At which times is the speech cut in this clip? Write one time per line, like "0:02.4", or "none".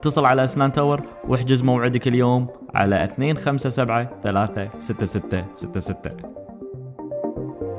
0:06.1

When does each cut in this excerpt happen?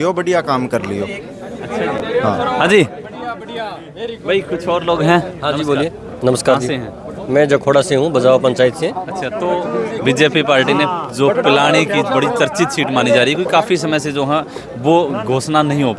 none

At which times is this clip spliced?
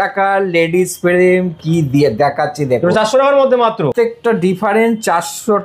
0:03.9

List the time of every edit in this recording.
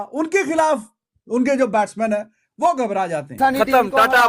0:03.3

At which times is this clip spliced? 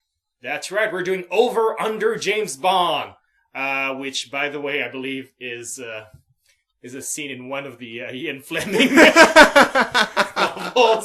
none

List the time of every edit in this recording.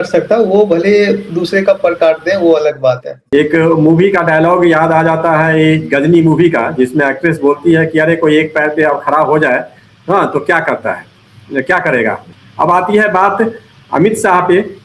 0:03.1
0:12.3

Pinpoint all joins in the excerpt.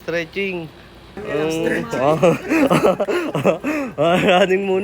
0:01.2

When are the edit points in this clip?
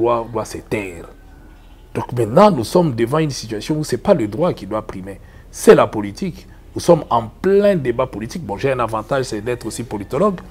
none

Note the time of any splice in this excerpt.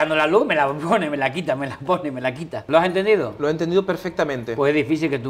0:02.6

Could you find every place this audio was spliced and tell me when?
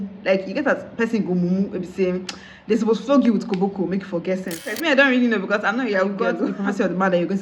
0:04.7
0:06.4

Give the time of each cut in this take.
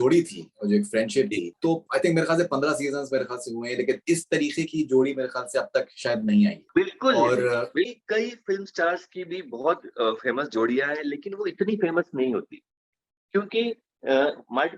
0:07.9

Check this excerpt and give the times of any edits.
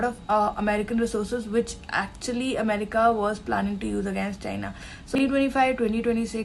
0:05.2

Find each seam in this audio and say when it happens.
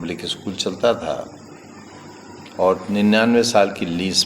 none

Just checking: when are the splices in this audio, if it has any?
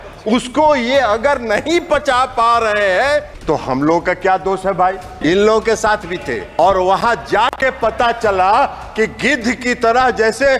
0:03.3
0:05.1
0:06.4

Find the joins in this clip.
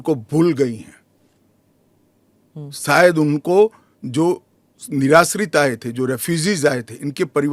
none

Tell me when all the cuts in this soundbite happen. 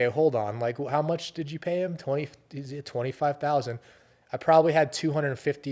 none

